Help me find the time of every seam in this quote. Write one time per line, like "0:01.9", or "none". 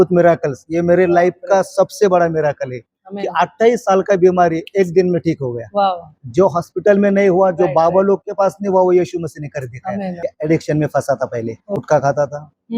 0:10.2
0:11.8